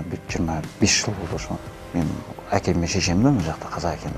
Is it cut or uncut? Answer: cut